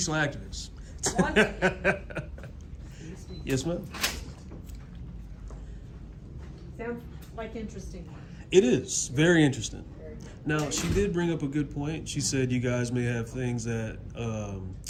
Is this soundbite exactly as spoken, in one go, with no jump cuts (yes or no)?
yes